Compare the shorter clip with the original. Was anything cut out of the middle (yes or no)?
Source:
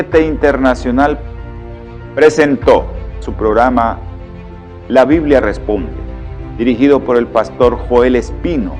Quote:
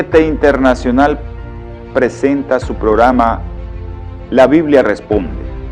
yes